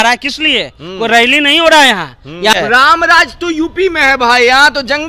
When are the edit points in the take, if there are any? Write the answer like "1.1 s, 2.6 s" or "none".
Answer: 2.5 s